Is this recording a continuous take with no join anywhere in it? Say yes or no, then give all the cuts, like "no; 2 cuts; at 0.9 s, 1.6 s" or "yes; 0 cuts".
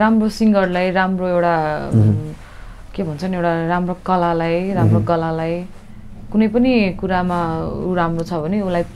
yes; 0 cuts